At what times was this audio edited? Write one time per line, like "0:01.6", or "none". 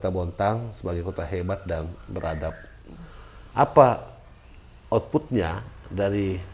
none